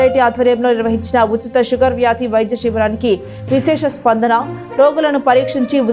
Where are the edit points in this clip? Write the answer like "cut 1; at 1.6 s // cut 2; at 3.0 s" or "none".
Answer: none